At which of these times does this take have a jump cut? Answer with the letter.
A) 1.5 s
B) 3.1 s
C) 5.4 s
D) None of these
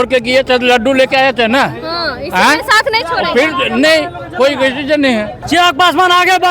C